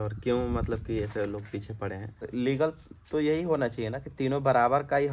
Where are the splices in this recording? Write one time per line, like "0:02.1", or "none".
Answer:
0:02.3